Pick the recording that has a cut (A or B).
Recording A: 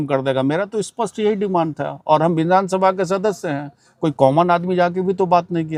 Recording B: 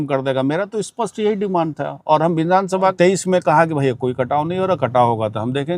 B